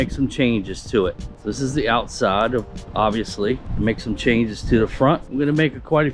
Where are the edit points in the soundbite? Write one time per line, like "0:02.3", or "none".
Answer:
0:03.7